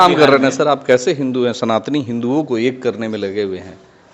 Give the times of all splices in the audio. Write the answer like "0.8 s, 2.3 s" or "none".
none